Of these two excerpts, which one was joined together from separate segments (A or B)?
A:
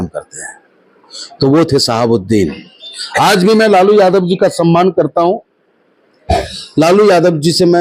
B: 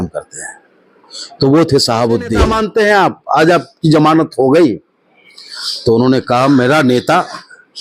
B